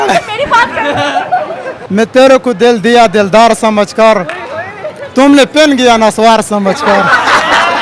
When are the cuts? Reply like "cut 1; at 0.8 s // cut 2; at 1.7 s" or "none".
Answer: cut 1; at 1.7 s